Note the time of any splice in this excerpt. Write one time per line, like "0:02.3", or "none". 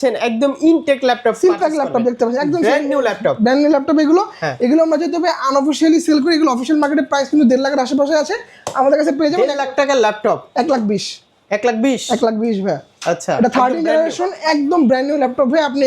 none